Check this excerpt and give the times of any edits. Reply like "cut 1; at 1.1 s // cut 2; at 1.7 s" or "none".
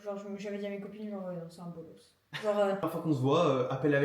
cut 1; at 2.8 s